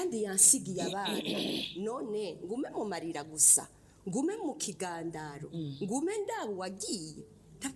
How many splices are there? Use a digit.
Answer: 0